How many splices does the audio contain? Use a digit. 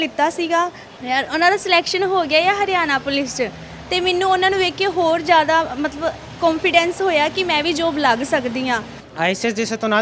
1